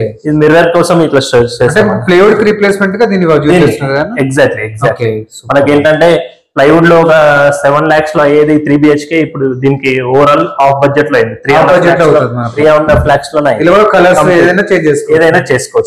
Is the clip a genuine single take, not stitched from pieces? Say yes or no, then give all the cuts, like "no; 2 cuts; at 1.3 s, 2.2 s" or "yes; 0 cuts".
yes; 0 cuts